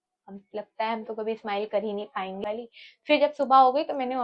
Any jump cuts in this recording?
yes; 1 cut; at 2.4 s

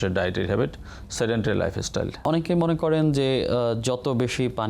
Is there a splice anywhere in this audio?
yes; 1 cut; at 2.2 s

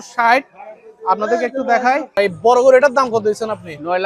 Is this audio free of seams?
no; 1 cut; at 2.2 s

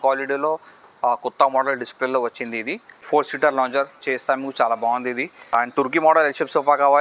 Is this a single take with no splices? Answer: no; 2 cuts; at 2.9 s, 5.7 s

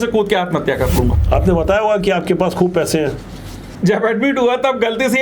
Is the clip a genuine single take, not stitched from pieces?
no; 2 cuts; at 1.2 s, 3.6 s

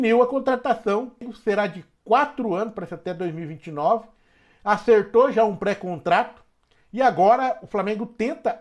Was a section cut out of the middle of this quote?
yes; 1 cut; at 1.3 s

